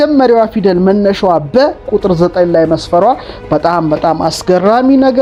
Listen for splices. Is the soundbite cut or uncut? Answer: uncut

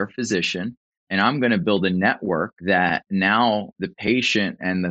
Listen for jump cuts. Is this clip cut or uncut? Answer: cut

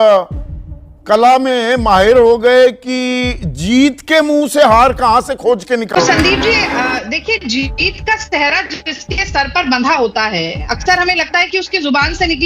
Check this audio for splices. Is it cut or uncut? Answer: cut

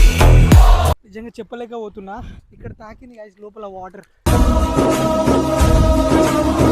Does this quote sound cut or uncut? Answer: cut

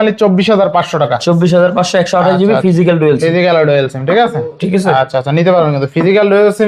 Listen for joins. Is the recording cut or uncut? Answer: uncut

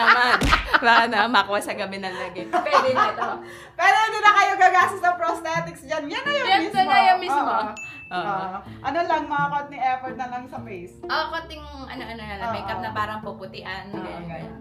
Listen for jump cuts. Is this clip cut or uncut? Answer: uncut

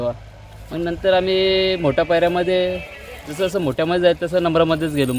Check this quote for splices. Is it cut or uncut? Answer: uncut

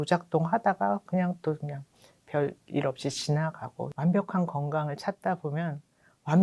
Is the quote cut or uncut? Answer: cut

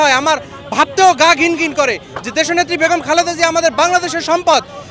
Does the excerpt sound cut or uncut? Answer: uncut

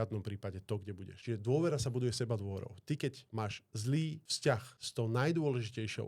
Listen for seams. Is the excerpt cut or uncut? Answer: cut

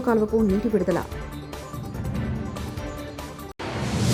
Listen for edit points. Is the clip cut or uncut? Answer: uncut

